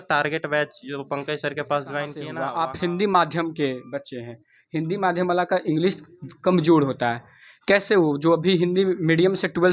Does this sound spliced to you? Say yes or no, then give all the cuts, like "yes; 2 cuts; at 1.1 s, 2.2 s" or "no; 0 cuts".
yes; 1 cut; at 2.3 s